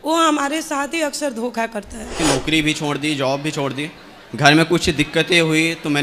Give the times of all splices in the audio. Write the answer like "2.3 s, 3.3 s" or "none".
2.2 s